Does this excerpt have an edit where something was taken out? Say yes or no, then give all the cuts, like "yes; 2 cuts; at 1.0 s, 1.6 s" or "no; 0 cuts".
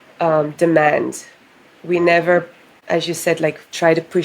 yes; 1 cut; at 2.7 s